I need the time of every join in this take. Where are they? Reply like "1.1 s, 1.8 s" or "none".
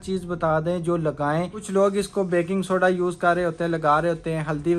1.6 s